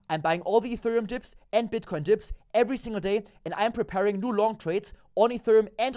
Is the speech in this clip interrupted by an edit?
no; 0 cuts

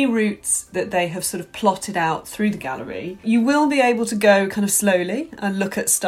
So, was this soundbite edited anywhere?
yes; 1 cut; at 3.2 s

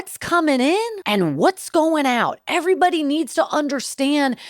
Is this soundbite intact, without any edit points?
no; 1 cut; at 1.0 s

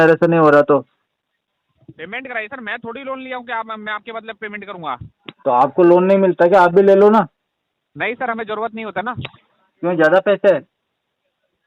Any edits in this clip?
no; 0 cuts

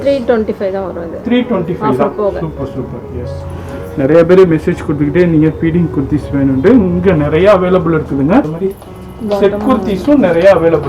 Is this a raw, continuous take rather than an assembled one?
no; 2 cuts; at 3.4 s, 8.5 s

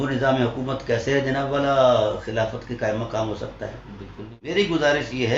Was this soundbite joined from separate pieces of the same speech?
yes; 1 cut; at 4.5 s

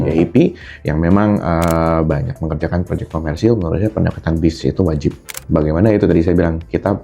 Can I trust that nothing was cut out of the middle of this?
no; 1 cut; at 5.4 s

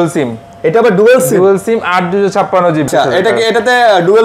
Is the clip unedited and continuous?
no; 1 cut; at 2.9 s

